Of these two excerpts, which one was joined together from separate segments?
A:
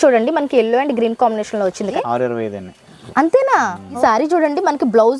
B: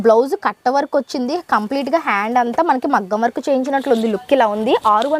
A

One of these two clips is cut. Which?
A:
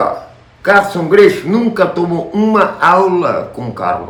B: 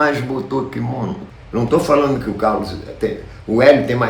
B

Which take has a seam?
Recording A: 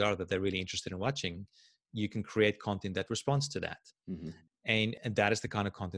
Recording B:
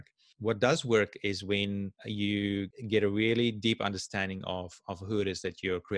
B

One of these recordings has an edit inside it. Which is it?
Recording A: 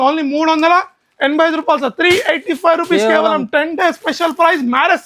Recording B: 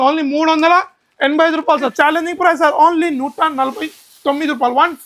B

